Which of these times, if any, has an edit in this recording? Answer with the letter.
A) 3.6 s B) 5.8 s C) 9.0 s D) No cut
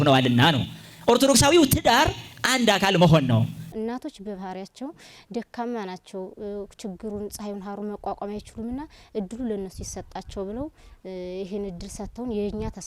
A